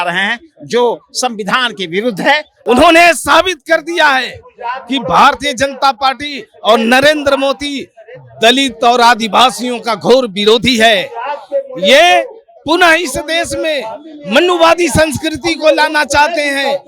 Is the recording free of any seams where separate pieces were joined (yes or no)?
no